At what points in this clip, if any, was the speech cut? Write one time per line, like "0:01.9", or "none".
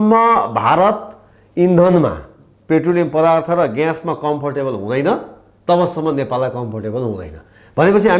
none